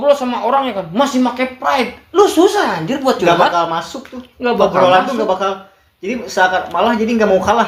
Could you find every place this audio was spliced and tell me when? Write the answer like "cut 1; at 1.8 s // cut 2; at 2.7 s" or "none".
none